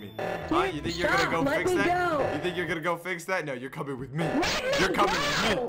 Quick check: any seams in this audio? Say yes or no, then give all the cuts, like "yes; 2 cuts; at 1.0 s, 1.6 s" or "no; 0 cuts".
no; 0 cuts